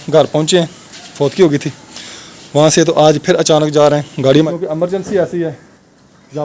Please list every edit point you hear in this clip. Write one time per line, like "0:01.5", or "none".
0:04.4